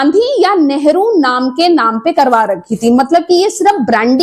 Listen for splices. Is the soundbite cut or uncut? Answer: uncut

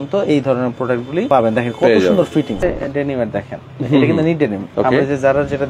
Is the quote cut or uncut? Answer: cut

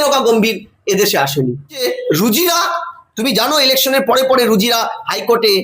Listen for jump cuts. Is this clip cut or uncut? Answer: cut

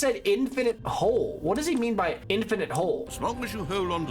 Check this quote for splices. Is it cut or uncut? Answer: cut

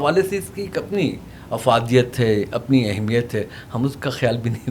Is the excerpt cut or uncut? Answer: uncut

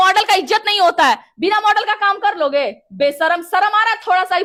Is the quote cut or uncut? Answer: uncut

